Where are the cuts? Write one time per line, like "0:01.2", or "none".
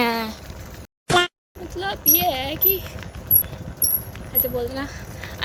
none